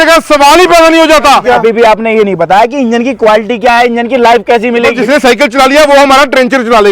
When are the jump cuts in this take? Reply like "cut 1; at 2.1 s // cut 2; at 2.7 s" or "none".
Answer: cut 1; at 1.4 s // cut 2; at 4.9 s

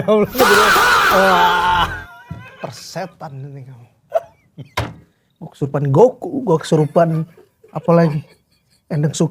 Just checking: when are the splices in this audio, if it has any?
cut 1; at 4.6 s

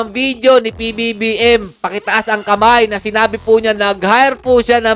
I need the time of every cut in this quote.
none

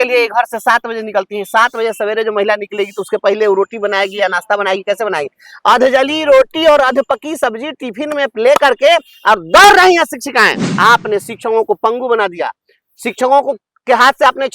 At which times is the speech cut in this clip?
cut 1; at 10.6 s

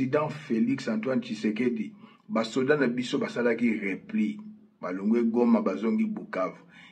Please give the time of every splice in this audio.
none

